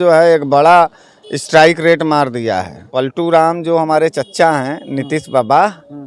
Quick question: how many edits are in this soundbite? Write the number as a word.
one